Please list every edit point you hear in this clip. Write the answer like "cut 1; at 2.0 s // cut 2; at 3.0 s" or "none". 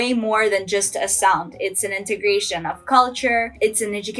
none